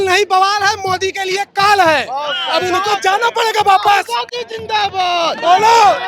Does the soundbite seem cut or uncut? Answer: uncut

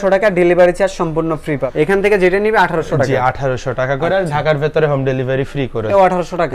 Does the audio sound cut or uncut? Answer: uncut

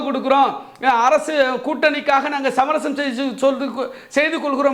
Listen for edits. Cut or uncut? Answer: uncut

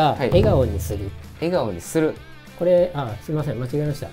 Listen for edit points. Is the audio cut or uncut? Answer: uncut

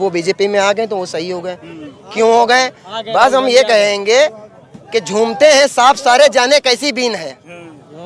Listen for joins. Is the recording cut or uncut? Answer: uncut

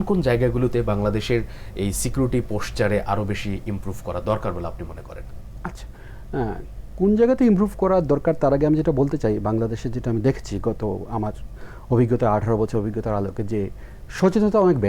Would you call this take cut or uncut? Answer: uncut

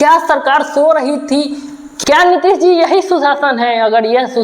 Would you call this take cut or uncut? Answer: cut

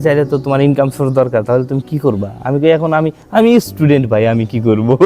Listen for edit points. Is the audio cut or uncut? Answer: uncut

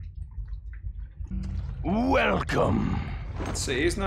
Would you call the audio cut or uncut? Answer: cut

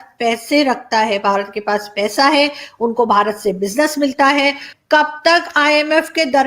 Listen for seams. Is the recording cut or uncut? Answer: cut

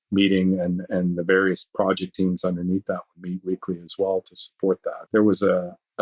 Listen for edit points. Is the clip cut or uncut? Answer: cut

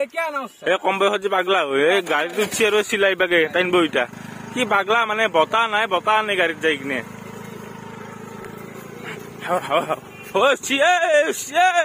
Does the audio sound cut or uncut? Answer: uncut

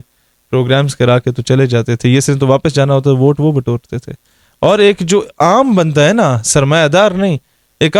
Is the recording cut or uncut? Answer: uncut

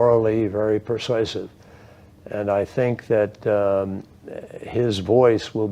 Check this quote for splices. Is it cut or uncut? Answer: cut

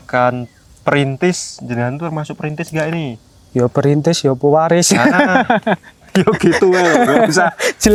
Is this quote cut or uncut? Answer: uncut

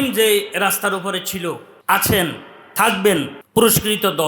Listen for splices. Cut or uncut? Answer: cut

